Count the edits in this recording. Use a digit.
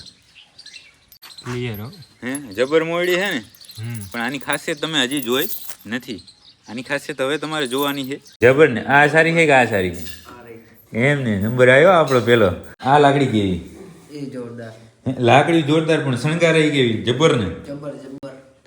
3